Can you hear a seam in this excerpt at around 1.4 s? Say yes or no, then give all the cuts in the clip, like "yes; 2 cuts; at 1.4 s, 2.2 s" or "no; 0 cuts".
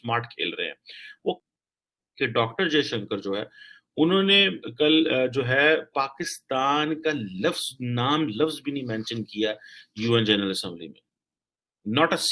yes; 1 cut; at 1.4 s